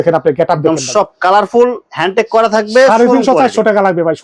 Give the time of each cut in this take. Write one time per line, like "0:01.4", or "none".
none